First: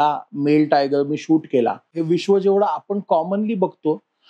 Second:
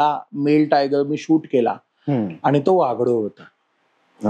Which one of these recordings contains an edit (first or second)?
first